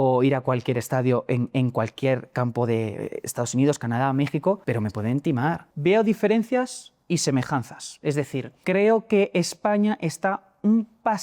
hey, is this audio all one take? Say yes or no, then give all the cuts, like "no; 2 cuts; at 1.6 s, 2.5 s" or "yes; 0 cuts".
no; 3 cuts; at 4.6 s, 5.7 s, 8.5 s